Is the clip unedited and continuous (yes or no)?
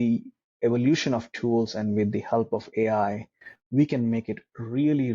yes